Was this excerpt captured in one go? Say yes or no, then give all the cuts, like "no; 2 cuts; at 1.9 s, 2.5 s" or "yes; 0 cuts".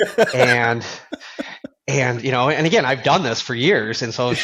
yes; 0 cuts